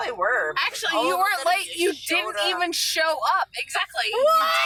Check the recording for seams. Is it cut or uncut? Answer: uncut